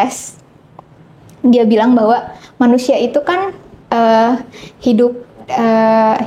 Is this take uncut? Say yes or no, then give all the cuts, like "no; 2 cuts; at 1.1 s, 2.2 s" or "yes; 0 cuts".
yes; 0 cuts